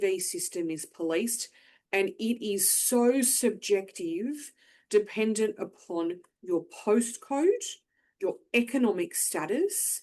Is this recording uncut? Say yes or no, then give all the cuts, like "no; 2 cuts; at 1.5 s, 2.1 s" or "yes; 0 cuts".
yes; 0 cuts